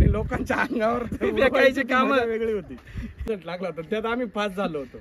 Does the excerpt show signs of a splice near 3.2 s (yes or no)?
yes